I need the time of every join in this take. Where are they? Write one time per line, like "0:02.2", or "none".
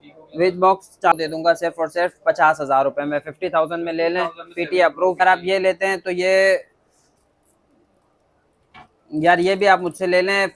0:01.1
0:05.2

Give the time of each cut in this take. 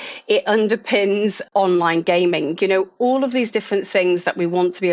0:01.4

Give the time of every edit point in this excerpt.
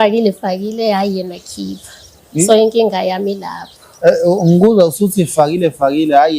none

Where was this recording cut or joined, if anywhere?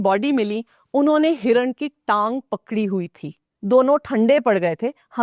none

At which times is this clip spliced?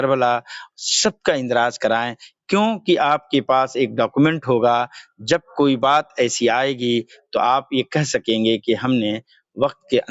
none

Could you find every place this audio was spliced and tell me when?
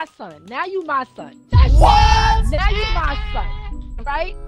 none

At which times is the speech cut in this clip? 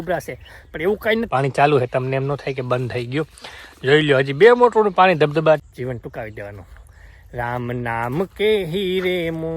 0:01.3
0:05.7

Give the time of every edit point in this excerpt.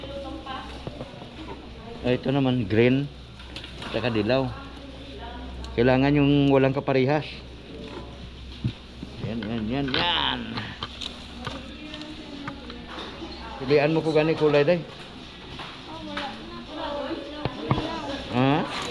0:13.7

